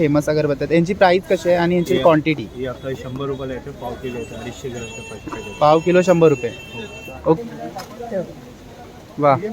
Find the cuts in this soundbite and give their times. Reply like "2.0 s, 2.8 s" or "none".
7.4 s